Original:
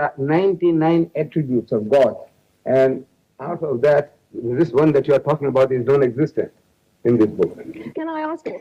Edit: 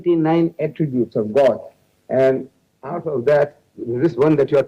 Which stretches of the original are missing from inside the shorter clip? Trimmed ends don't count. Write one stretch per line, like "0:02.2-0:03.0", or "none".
none